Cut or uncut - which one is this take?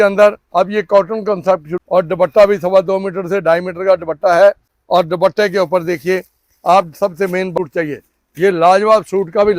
cut